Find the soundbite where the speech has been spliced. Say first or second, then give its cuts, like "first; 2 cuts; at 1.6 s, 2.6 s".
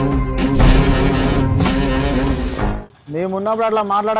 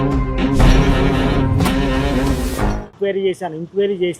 second; 1 cut; at 2.9 s